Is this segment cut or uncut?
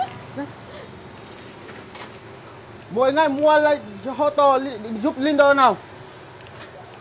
uncut